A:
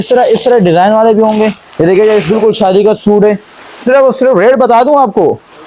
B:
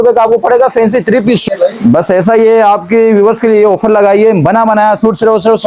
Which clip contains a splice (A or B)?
B